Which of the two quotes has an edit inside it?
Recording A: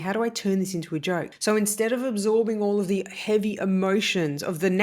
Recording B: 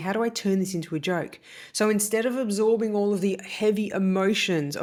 A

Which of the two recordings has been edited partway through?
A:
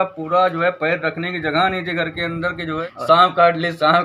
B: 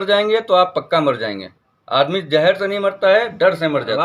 A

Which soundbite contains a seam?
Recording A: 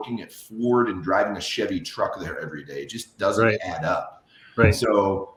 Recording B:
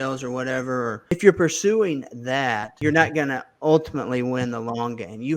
B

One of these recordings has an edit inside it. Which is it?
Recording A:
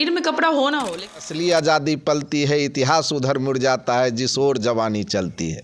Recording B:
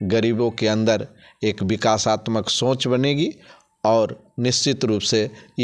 A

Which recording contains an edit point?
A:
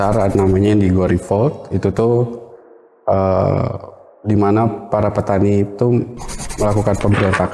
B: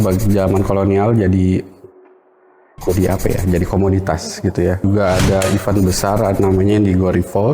B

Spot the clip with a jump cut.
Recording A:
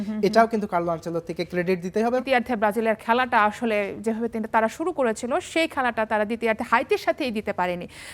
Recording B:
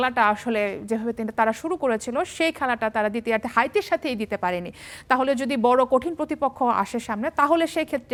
A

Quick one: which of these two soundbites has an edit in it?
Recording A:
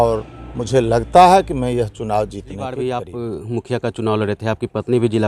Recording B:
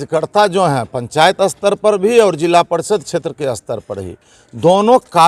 A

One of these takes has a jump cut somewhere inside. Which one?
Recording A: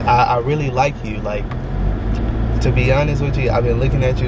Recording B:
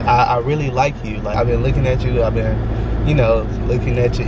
B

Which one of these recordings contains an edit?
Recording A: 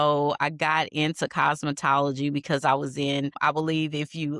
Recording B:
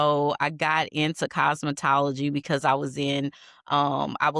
A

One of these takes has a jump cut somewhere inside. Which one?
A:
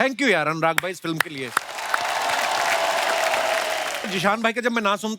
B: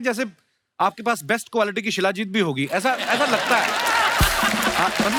A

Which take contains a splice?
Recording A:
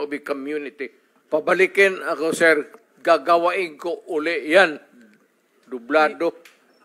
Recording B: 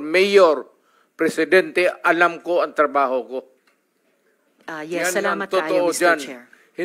A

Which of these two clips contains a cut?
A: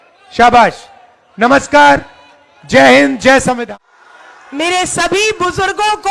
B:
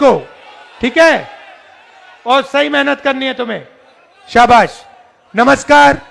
A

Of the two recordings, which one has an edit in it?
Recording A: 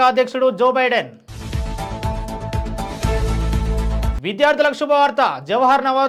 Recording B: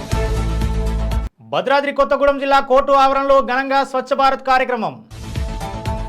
B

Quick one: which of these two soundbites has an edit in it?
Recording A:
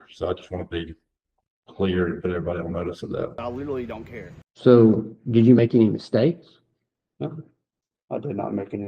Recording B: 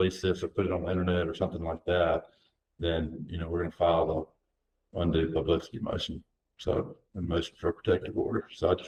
A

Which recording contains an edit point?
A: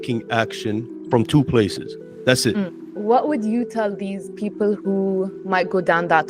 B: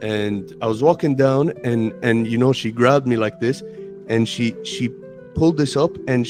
A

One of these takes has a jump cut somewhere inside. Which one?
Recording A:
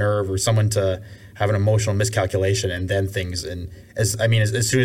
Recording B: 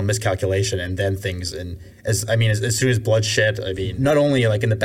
B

